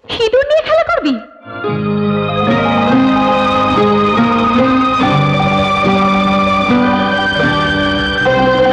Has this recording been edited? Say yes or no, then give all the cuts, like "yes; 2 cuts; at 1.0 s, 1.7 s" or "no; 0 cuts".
no; 0 cuts